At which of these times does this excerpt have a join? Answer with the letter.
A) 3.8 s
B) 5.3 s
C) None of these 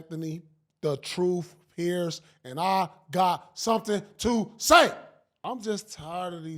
B